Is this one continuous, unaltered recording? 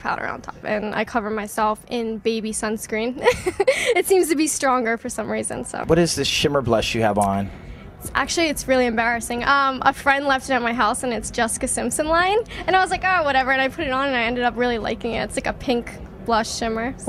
yes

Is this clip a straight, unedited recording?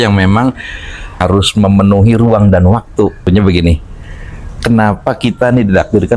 no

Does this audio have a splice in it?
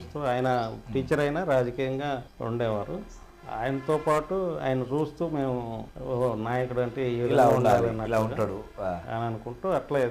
yes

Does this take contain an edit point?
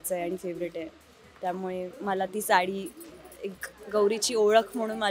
no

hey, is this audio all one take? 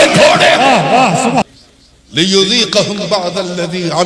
no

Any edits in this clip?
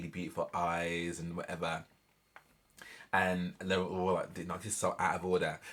no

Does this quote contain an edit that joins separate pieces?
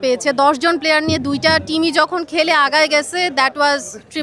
no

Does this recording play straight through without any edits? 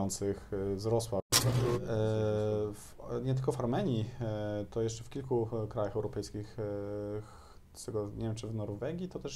no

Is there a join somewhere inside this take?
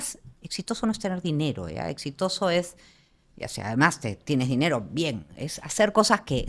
no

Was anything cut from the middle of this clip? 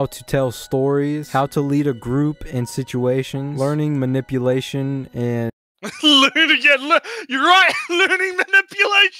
no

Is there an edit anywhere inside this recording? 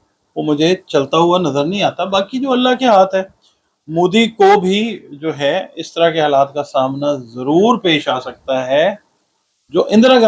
no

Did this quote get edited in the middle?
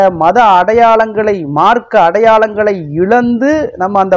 no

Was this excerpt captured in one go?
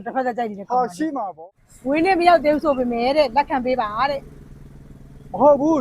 no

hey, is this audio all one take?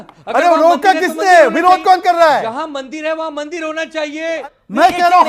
no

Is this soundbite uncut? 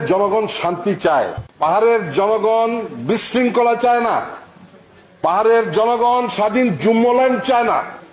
no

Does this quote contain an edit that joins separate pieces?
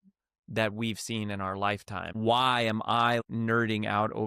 yes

